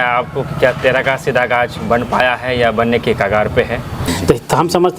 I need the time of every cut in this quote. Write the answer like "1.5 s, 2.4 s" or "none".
4.1 s